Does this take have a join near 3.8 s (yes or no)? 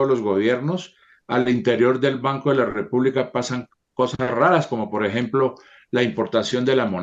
no